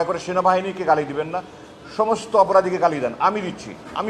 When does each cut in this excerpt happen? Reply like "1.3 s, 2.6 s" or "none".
none